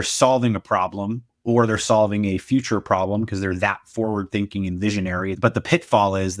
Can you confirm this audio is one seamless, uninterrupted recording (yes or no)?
no